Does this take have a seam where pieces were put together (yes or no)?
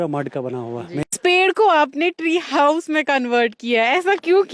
yes